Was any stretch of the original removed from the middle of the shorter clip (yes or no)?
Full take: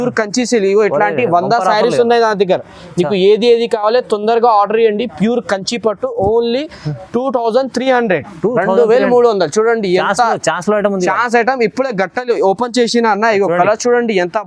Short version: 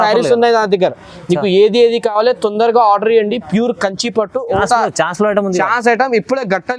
yes